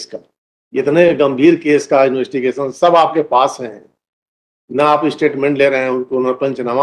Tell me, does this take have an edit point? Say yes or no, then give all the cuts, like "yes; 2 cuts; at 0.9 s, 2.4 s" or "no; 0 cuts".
no; 0 cuts